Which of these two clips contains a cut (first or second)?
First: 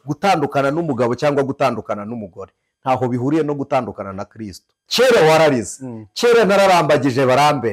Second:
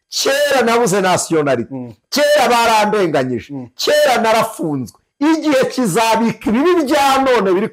first